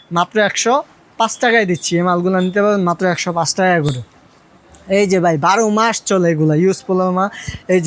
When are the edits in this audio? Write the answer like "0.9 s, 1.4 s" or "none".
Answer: none